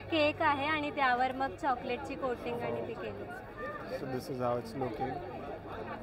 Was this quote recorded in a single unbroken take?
yes; 0 cuts

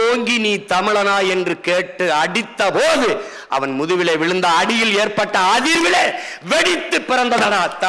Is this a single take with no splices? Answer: yes; 0 cuts

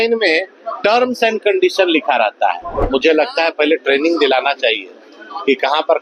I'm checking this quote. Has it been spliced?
yes; 1 cut; at 2.8 s

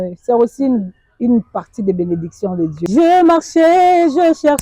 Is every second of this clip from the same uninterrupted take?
no; 1 cut; at 2.8 s

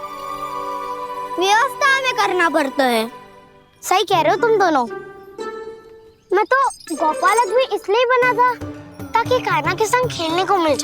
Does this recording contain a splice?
no; 0 cuts

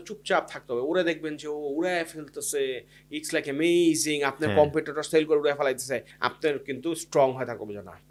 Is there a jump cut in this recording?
no; 0 cuts

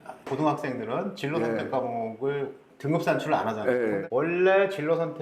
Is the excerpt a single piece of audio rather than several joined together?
no; 1 cut; at 4.1 s

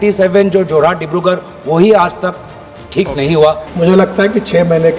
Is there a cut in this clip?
yes; 1 cut; at 3.7 s

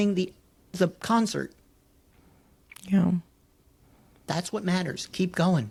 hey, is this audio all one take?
yes; 0 cuts

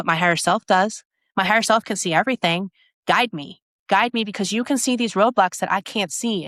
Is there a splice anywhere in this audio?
no; 0 cuts

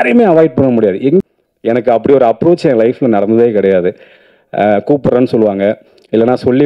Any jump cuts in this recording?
yes; 1 cut; at 1.2 s

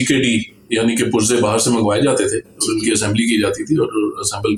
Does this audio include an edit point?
no; 0 cuts

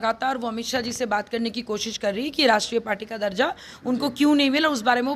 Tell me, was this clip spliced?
no; 0 cuts

